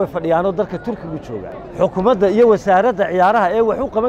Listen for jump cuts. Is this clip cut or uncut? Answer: cut